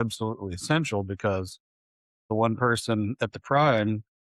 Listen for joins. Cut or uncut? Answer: cut